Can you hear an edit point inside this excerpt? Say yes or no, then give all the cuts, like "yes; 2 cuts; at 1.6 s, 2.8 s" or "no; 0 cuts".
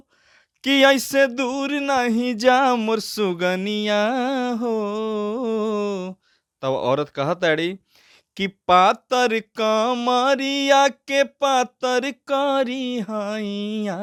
no; 0 cuts